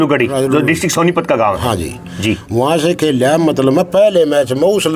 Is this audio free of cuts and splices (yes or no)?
yes